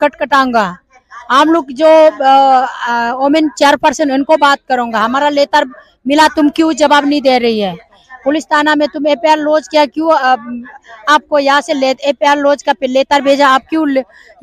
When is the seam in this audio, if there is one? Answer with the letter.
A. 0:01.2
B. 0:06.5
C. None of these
C